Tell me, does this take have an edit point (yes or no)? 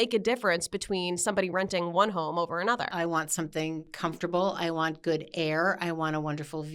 yes